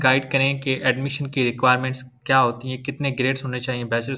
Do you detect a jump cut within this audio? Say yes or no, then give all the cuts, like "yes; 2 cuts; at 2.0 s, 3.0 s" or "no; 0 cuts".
no; 0 cuts